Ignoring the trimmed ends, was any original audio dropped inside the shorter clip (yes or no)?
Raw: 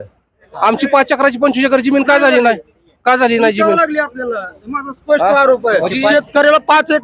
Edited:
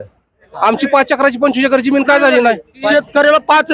yes